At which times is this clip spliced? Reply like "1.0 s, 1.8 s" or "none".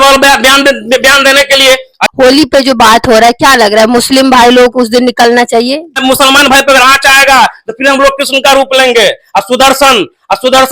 2.0 s, 6.0 s